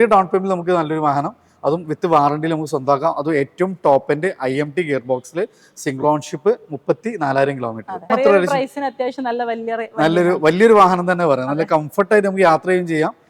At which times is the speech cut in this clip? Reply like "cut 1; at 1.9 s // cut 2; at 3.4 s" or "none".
cut 1; at 8.1 s